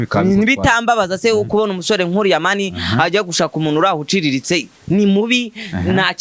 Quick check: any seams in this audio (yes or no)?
yes